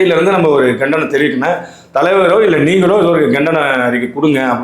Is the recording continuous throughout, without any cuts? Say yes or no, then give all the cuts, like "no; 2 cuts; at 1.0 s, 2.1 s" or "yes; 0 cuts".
yes; 0 cuts